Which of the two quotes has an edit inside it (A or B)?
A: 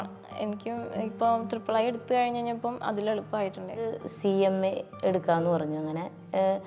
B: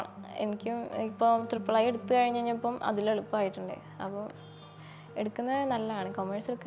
A